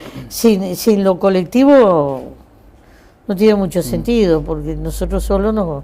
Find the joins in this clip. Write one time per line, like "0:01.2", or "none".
none